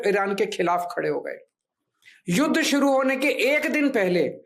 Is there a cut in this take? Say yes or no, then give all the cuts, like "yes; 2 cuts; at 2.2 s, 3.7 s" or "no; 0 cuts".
no; 0 cuts